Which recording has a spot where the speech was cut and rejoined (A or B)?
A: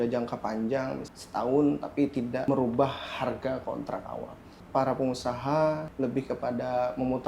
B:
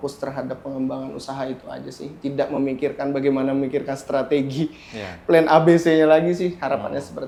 A